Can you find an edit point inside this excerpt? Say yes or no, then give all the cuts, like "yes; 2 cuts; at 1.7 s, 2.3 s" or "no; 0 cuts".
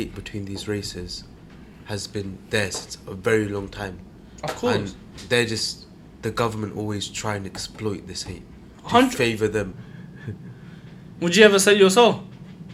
yes; 1 cut; at 9.8 s